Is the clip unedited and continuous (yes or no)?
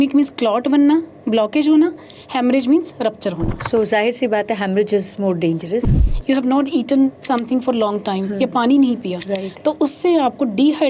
no